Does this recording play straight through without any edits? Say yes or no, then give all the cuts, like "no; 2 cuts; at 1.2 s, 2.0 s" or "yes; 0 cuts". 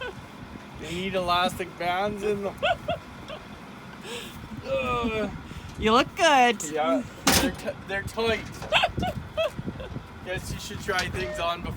yes; 0 cuts